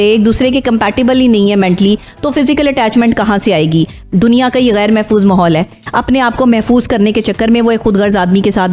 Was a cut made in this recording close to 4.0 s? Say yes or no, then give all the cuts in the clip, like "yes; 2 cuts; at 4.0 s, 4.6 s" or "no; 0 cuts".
yes; 1 cut; at 4.0 s